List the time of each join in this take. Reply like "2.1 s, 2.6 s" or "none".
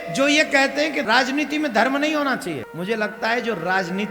1.1 s, 2.7 s